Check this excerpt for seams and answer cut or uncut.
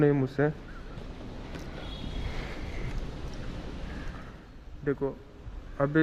uncut